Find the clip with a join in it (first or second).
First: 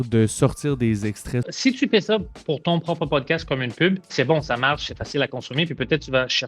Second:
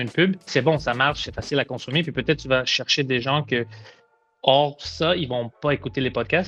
first